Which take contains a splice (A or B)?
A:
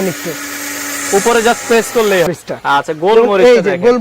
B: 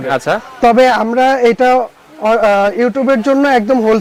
A